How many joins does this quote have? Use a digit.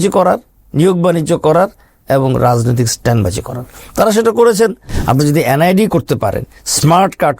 1